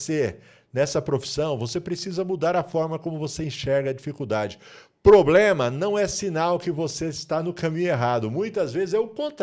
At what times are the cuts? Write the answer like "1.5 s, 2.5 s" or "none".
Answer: none